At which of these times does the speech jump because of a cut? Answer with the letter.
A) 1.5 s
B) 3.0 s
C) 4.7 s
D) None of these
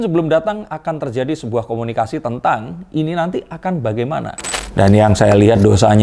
C